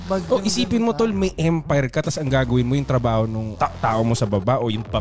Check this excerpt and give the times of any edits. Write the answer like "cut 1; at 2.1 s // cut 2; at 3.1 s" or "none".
none